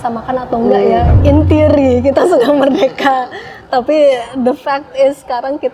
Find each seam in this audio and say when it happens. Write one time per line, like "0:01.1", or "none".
0:01.2